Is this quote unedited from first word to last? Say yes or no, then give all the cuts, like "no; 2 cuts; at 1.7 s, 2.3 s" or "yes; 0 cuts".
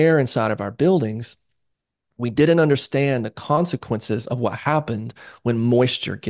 yes; 0 cuts